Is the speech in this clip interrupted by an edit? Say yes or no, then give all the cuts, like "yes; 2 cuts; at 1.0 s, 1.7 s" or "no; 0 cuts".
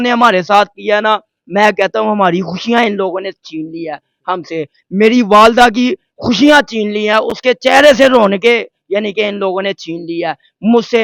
no; 0 cuts